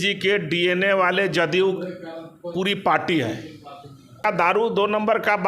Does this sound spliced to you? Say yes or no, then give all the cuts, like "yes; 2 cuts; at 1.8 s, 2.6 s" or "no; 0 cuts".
yes; 1 cut; at 4.2 s